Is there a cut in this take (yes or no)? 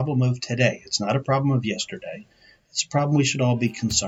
no